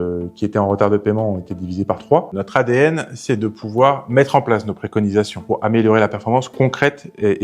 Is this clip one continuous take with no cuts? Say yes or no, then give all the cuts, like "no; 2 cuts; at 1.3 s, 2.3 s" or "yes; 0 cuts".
no; 2 cuts; at 2.3 s, 5.4 s